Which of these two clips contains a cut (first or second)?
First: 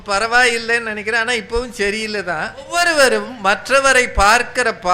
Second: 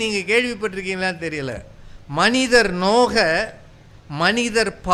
first